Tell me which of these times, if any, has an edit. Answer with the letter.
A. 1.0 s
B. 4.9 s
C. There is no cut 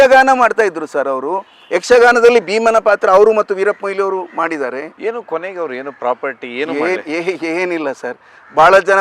B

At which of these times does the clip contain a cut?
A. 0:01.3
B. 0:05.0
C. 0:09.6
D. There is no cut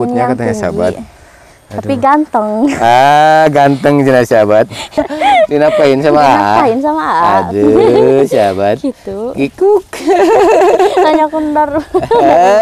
B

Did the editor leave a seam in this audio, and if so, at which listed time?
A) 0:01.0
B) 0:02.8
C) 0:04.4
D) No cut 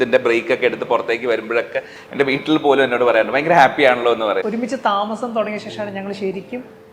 C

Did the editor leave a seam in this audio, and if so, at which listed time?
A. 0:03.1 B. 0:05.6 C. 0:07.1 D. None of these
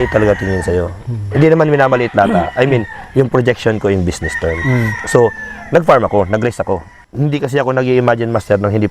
C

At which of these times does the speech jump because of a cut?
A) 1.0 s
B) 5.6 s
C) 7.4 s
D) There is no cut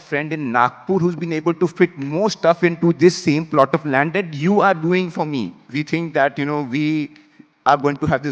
B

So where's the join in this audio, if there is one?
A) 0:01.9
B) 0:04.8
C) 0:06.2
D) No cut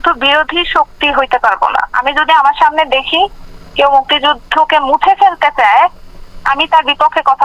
A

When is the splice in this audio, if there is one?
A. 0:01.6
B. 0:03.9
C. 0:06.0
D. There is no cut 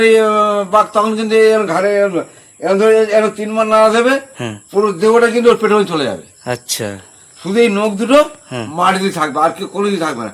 D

